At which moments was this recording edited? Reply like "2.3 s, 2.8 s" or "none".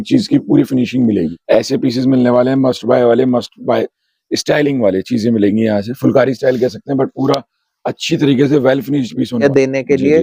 1.3 s, 9.4 s